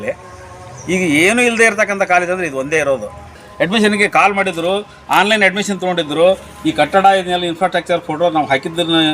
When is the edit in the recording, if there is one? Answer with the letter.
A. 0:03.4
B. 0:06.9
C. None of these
A